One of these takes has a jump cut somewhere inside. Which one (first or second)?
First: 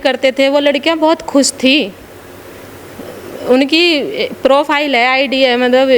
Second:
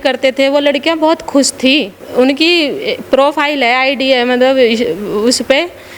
second